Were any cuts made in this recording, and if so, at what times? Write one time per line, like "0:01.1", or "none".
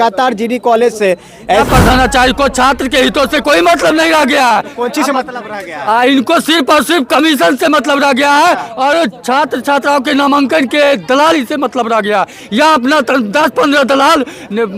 0:01.7